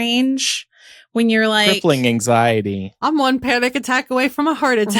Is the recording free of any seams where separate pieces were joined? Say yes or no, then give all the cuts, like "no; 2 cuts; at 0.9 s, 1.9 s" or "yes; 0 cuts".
no; 1 cut; at 3.0 s